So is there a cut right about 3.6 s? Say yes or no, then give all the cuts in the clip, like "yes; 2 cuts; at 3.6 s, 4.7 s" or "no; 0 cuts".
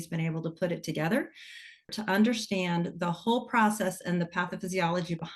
no; 1 cut; at 1.9 s